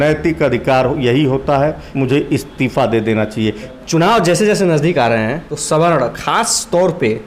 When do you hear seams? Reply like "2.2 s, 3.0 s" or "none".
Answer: 1.8 s, 3.7 s, 5.5 s